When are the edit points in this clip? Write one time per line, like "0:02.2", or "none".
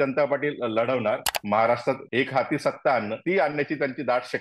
0:01.3
0:02.0
0:03.1